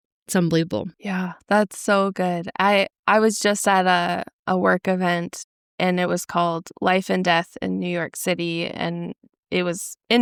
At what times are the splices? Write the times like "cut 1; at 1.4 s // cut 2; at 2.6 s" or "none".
none